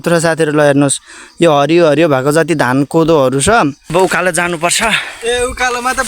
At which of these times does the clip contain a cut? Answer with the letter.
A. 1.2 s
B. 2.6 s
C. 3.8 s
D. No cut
C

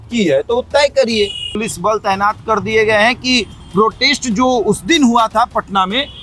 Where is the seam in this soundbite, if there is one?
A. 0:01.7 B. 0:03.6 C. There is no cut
A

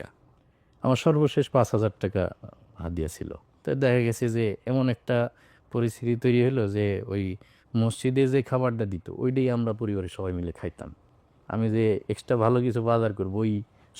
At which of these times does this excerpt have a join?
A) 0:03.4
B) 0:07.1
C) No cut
A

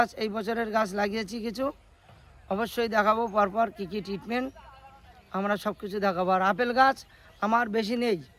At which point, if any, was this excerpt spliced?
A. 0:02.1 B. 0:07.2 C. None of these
C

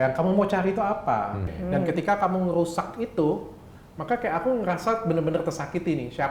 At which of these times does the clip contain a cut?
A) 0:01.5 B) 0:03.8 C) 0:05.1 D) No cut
A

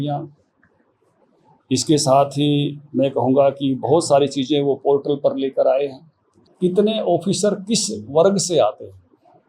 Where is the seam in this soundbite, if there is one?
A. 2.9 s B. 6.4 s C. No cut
B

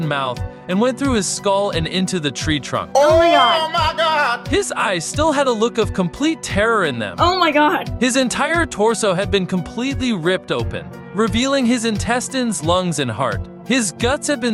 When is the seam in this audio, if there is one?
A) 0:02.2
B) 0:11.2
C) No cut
C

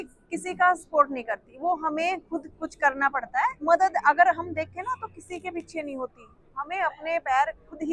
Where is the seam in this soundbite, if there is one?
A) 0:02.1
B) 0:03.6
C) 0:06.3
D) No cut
B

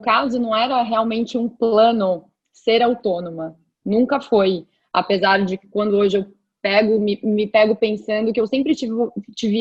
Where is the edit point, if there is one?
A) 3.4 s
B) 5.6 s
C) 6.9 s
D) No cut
D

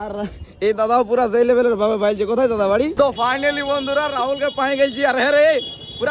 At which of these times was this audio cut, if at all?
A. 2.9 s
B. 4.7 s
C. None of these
A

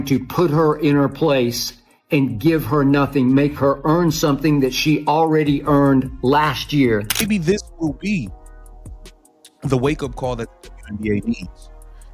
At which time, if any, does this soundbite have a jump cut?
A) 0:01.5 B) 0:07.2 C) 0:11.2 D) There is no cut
B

